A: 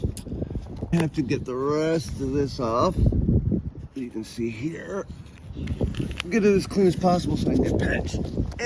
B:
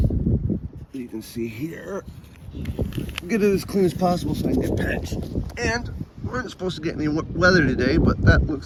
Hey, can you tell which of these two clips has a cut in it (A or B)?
A